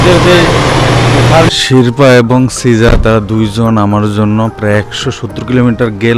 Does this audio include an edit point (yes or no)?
yes